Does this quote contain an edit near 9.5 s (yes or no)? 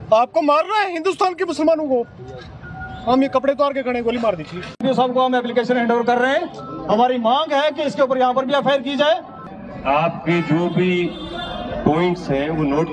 yes